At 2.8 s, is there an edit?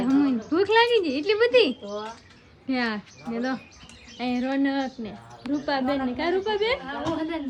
no; 0 cuts

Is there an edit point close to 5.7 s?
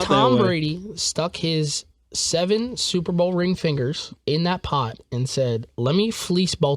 no; 1 cut; at 4.1 s

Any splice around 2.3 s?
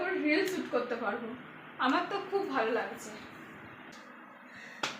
no; 1 cut; at 3.9 s

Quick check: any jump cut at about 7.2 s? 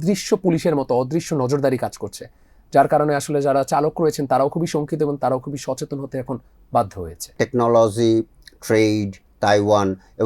yes; 1 cut; at 7.2 s

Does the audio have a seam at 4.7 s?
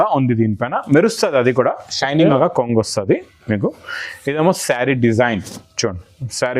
no; 1 cut; at 2.4 s

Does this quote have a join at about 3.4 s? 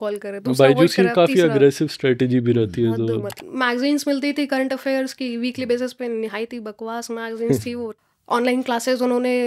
yes; 2 cuts; at 3.4 s, 8.0 s

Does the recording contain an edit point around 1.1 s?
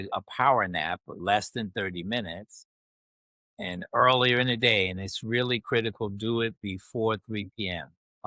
yes; 1 cut; at 1.1 s

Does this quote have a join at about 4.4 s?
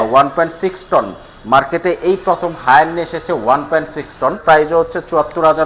yes; 1 cut; at 4.4 s

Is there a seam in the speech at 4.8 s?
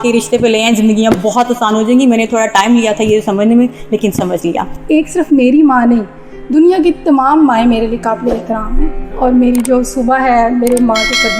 yes; 2 cuts; at 4.8 s, 9.0 s

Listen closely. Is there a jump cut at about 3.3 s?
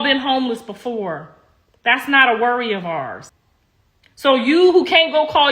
yes; 1 cut; at 3.3 s

